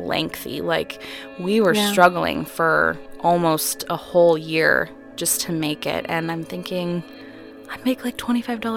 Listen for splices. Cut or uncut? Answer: uncut